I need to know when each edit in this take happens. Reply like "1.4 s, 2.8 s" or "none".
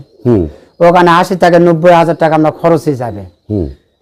none